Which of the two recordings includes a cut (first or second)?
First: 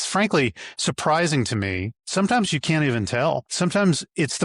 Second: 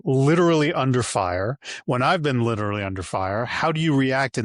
first